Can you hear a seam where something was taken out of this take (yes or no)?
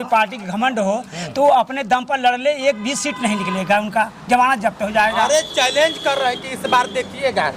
no